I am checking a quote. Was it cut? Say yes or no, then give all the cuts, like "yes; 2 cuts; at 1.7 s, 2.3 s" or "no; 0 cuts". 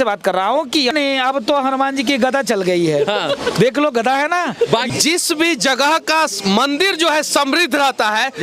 yes; 2 cuts; at 0.9 s, 4.9 s